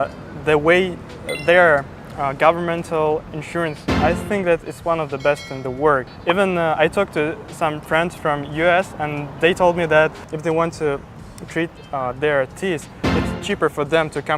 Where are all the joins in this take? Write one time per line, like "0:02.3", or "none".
0:06.1